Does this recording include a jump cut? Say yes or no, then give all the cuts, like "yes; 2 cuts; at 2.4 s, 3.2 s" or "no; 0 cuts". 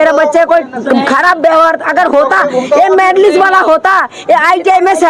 no; 0 cuts